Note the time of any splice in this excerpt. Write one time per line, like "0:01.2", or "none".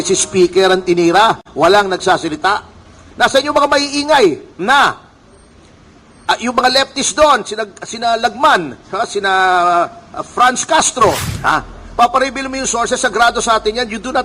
0:11.3